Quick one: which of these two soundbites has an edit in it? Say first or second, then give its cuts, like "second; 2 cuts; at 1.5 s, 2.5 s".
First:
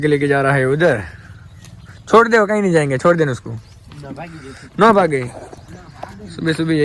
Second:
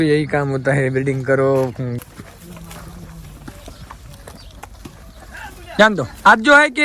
second; 1 cut; at 1.9 s